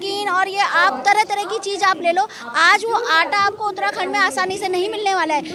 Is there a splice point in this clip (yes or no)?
no